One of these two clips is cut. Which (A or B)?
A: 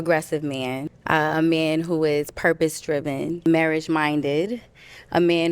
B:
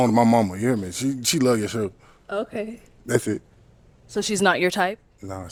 A